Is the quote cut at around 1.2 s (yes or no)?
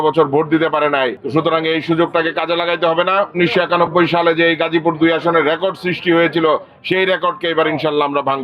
yes